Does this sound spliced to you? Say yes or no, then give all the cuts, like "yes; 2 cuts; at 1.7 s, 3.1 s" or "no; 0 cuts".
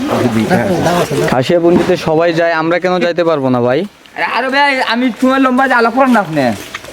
yes; 1 cut; at 1.3 s